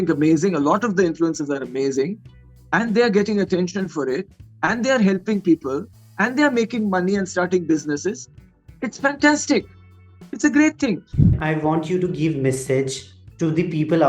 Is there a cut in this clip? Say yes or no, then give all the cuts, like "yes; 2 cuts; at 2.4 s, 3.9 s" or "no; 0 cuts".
yes; 1 cut; at 11.4 s